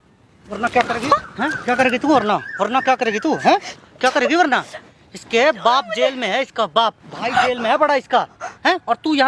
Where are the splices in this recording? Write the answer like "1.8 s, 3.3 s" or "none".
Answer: none